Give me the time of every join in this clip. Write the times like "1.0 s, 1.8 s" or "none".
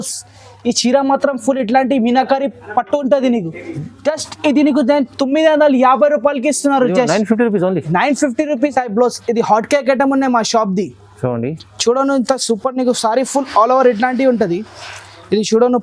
8.7 s